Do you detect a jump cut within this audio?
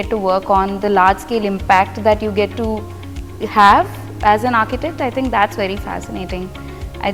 no; 0 cuts

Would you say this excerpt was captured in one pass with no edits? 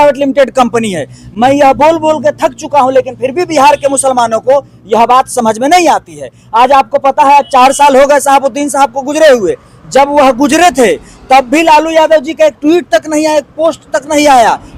yes; 0 cuts

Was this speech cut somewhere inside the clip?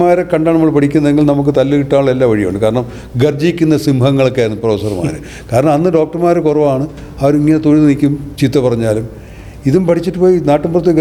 no; 0 cuts

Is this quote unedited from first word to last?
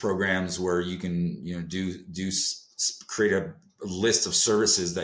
yes; 0 cuts

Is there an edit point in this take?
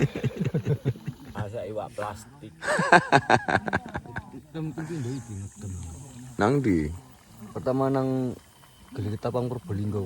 yes; 1 cut; at 1.4 s

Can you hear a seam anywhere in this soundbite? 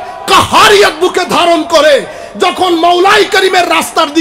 no; 0 cuts

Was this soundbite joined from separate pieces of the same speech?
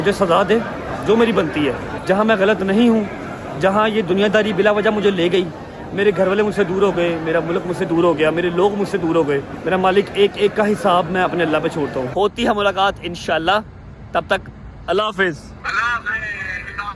yes; 4 cuts; at 1.9 s, 9.5 s, 12.1 s, 15.6 s

